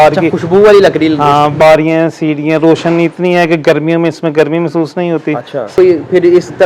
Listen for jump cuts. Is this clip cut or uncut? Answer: cut